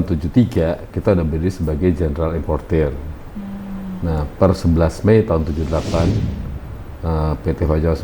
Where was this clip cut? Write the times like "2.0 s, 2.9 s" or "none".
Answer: none

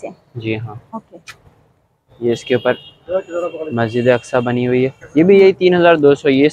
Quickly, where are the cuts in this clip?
5.0 s

